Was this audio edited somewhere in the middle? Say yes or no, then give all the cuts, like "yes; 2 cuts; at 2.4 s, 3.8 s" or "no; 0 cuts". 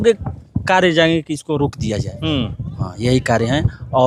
no; 0 cuts